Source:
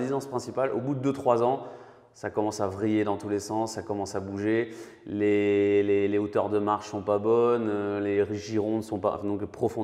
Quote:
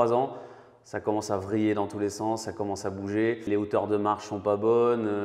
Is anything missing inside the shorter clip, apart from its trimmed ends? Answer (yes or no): yes